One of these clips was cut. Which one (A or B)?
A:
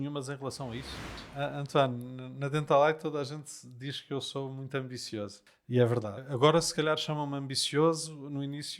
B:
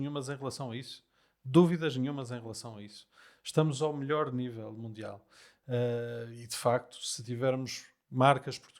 A